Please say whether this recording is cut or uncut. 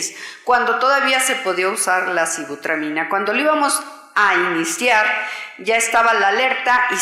uncut